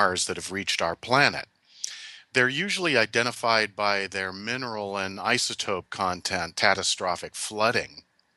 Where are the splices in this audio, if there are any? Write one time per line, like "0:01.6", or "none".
none